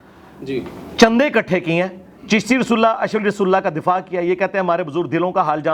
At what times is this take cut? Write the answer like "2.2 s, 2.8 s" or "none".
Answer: none